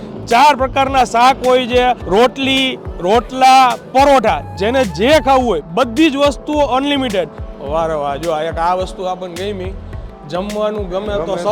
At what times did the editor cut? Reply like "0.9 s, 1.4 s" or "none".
2.0 s, 7.4 s